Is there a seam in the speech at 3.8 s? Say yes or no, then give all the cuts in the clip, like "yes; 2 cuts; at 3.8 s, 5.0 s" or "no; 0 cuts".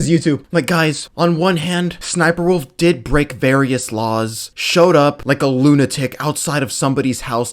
no; 2 cuts; at 1.0 s, 2.0 s